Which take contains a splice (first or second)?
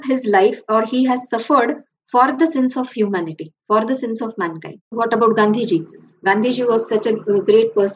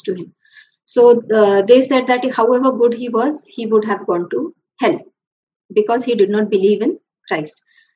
first